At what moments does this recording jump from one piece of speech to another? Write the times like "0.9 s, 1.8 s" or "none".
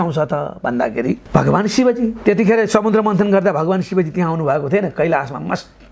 1.2 s